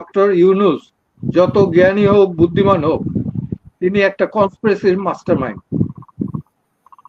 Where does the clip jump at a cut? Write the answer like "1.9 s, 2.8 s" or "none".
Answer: none